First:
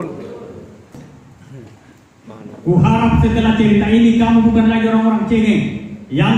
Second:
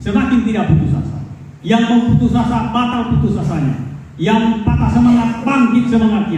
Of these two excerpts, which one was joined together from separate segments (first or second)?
first